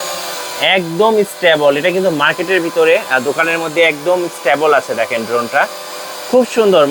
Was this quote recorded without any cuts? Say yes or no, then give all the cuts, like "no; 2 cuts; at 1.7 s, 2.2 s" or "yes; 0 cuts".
yes; 0 cuts